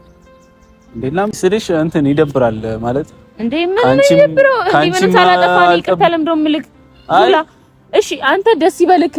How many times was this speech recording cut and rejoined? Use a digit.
1